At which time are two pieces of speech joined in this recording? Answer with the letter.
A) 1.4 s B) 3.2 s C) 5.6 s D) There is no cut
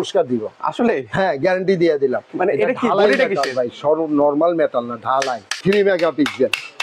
C